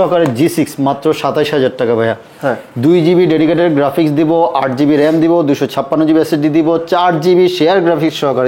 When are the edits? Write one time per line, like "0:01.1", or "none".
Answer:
none